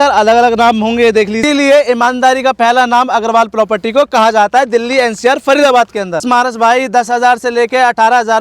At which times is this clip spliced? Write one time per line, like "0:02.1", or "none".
0:01.4
0:06.2